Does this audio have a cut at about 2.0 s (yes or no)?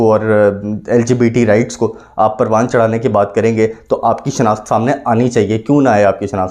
no